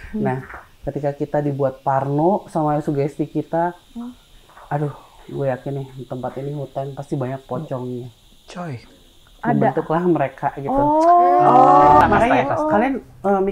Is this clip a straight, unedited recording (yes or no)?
no